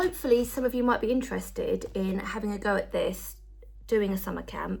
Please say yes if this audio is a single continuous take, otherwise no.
yes